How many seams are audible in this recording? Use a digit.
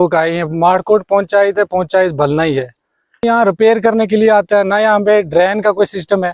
1